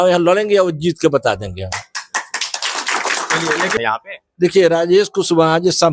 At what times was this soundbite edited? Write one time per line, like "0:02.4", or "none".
0:03.7